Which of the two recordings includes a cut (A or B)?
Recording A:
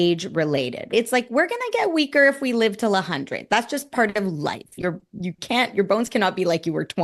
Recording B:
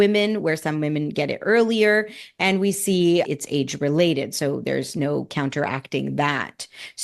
A